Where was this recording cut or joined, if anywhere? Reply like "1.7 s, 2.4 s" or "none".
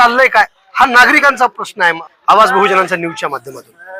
2.1 s